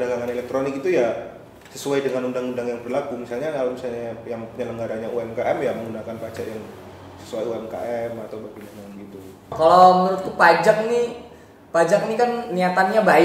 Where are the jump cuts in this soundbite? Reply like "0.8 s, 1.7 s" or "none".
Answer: 9.5 s